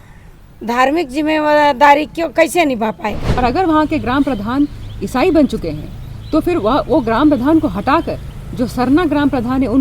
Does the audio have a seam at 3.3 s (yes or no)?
yes